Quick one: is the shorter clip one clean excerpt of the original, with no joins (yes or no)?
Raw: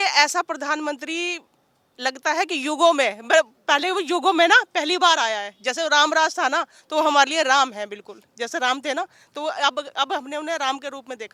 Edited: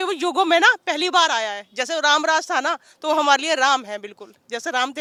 yes